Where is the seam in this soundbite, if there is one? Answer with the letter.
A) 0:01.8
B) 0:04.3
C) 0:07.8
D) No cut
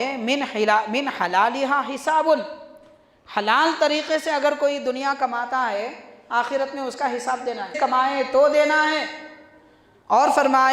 C